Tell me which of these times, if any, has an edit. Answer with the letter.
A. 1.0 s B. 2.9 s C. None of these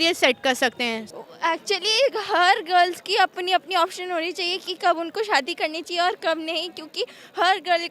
A